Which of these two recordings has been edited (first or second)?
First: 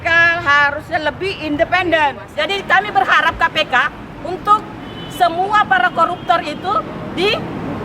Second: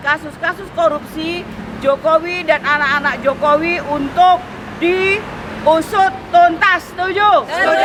first